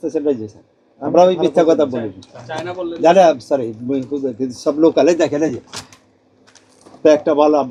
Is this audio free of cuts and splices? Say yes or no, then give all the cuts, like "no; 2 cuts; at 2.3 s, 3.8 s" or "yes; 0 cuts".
yes; 0 cuts